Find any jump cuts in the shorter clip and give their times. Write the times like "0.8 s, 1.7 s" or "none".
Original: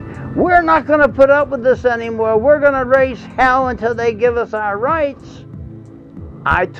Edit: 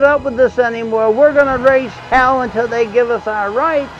none